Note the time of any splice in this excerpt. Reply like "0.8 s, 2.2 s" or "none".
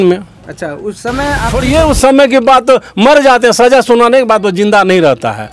1.5 s